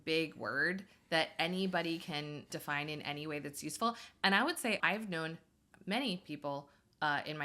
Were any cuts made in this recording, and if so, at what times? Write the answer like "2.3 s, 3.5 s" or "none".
2.5 s, 4.8 s

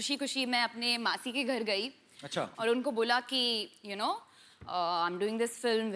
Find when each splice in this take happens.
none

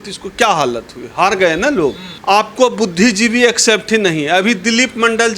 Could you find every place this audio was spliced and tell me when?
2.1 s

